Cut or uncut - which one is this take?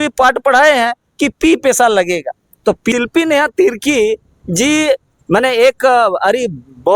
cut